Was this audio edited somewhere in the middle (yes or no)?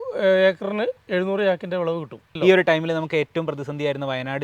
yes